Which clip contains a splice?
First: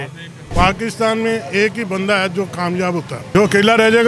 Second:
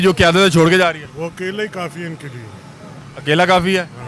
first; 1 cut; at 3.2 s

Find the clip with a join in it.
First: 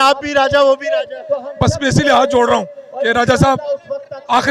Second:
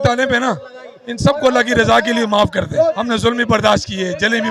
second; 1 cut; at 3.0 s

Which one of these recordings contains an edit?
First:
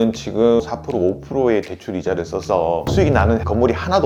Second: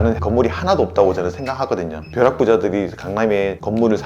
second; 1 cut; at 2.1 s

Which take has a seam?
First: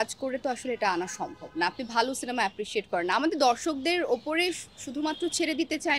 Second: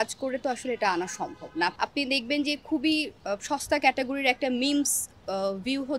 second; 1 cut; at 1.7 s

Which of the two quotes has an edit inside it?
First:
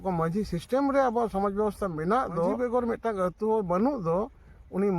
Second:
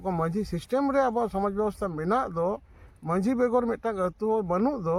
first; 1 cut; at 2.6 s

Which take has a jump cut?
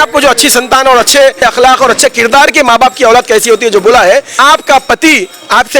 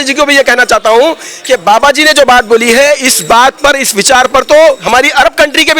first; 2 cuts; at 1.4 s, 4.3 s

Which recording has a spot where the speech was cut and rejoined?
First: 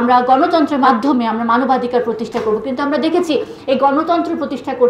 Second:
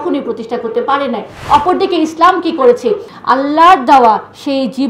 second; 2 cuts; at 1.3 s, 3.1 s

